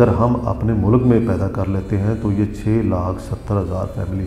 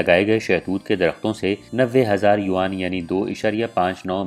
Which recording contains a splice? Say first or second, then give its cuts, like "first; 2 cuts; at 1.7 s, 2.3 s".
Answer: second; 1 cut; at 1.7 s